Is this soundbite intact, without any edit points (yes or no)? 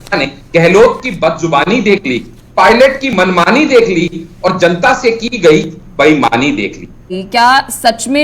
no